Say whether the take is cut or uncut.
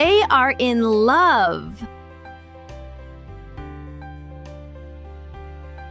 uncut